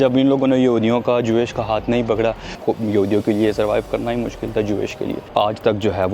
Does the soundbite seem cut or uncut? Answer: cut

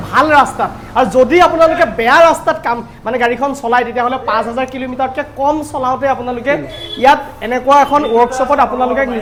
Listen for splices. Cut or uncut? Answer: uncut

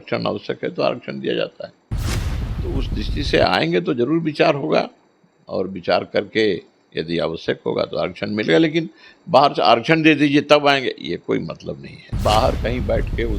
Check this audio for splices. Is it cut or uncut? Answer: cut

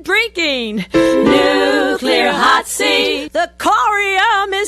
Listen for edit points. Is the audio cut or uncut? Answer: uncut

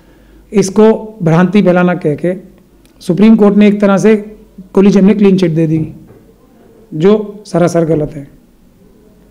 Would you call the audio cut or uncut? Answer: uncut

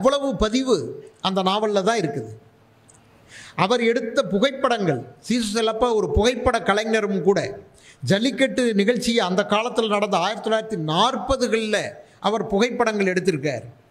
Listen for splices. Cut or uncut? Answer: uncut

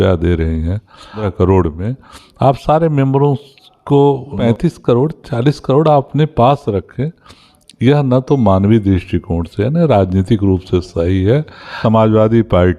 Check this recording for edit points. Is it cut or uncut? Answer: cut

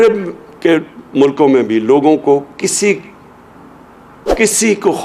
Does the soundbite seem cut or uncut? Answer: uncut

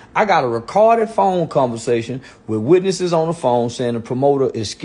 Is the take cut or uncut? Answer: uncut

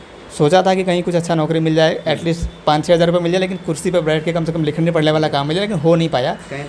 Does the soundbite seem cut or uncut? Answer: uncut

